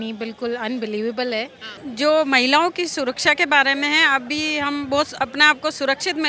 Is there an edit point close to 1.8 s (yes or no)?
yes